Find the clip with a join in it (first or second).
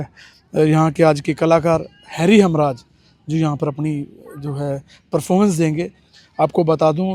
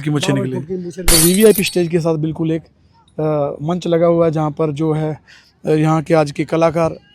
second